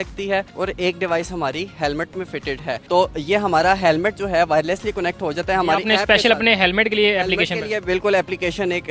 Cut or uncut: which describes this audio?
uncut